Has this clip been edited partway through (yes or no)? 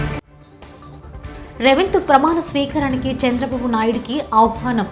yes